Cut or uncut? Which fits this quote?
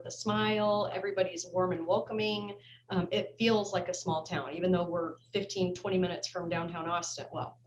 uncut